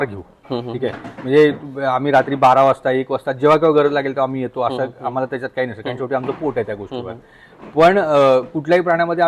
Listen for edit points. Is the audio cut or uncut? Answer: uncut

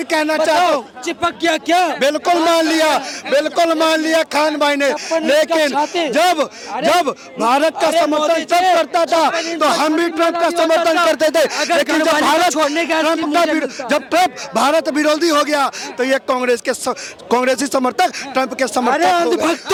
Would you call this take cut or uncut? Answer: uncut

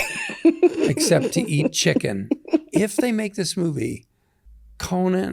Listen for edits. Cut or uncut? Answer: cut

